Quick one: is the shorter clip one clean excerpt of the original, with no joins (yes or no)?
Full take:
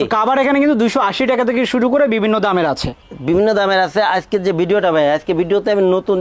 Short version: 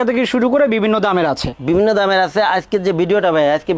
no